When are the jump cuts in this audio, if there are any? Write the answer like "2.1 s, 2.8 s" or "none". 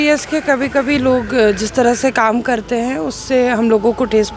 none